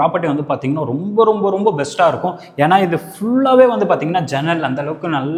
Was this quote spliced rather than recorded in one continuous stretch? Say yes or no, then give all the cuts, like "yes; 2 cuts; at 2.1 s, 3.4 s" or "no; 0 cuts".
no; 0 cuts